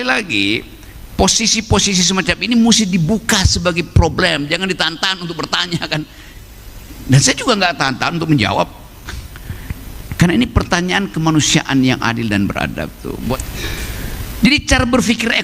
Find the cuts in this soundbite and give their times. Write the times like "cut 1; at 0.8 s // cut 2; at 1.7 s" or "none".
cut 1; at 13.3 s